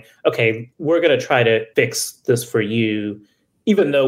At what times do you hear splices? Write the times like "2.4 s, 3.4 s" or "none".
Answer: 1.7 s

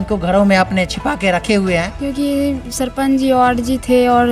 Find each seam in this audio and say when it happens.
1.9 s

